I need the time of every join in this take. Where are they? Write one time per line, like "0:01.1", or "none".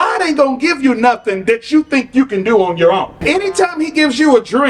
0:03.1

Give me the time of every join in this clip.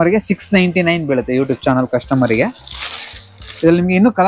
none

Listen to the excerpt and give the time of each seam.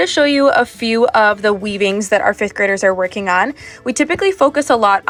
none

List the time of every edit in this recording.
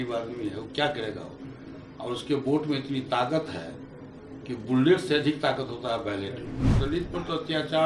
0:06.7

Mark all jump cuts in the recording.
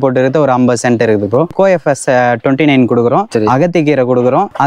0:01.5

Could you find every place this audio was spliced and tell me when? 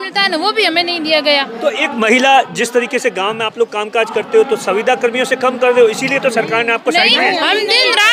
none

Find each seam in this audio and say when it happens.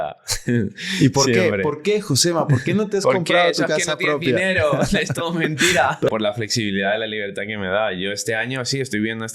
0:06.1

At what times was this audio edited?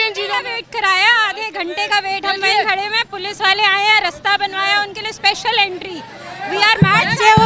none

